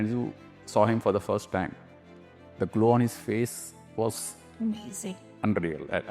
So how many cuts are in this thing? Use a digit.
0